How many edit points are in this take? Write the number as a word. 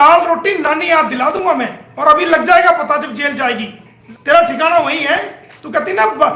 zero